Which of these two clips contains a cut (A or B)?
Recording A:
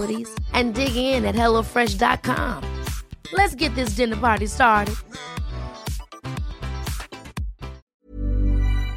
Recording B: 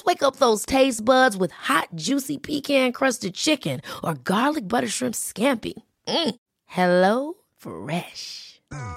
A